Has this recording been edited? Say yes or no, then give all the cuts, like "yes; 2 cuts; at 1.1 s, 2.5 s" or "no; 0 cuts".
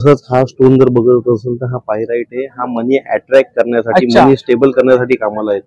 no; 0 cuts